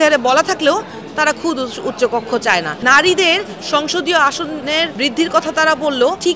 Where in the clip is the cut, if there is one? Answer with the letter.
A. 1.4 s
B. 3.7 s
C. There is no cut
C